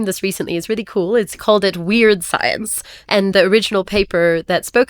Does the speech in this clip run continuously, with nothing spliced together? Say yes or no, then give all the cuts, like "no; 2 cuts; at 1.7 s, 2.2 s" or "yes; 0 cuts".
no; 2 cuts; at 1.4 s, 3.3 s